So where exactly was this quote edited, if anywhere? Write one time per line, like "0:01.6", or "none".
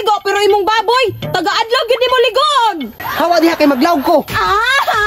0:02.9